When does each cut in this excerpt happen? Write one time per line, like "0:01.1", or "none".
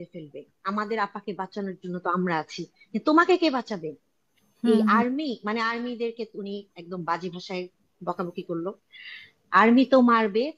none